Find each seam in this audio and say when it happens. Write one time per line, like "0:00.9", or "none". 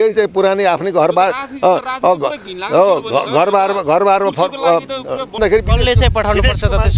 0:05.4